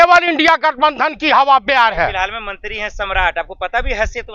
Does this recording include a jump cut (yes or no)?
no